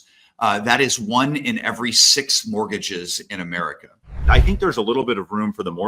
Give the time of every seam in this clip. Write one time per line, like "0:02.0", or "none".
0:04.2